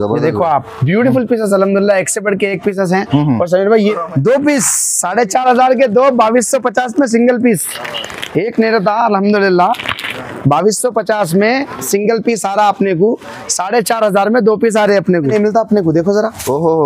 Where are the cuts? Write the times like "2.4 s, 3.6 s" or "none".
3.9 s, 15.3 s